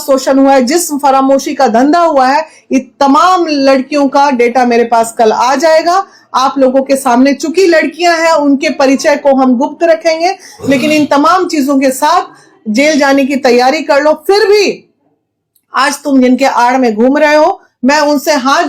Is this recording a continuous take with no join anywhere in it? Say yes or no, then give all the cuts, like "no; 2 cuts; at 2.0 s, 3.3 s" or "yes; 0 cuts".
yes; 0 cuts